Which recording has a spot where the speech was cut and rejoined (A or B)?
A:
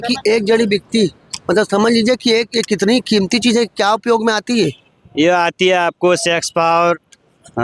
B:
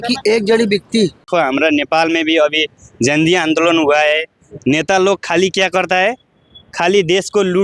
B